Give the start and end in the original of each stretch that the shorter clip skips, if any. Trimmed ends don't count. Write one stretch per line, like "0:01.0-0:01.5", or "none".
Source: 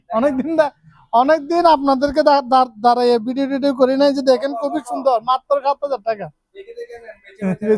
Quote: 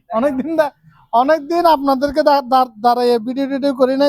none